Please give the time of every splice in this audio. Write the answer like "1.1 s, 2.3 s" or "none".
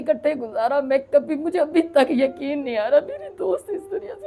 none